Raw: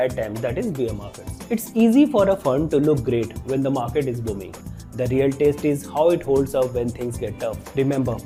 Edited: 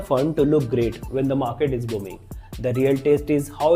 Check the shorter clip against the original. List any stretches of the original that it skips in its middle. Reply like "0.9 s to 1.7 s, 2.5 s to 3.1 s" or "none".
none